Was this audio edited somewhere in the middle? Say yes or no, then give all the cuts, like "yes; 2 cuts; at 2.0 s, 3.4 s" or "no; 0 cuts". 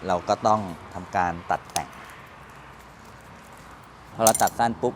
yes; 1 cut; at 4.1 s